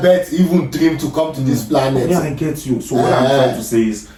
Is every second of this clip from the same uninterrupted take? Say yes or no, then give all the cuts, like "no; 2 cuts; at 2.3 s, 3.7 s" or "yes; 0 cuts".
yes; 0 cuts